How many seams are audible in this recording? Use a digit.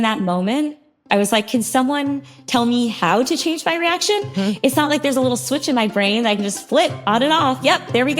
1